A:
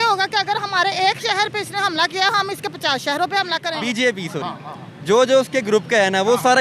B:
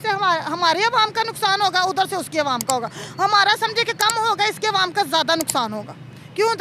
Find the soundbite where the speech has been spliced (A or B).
A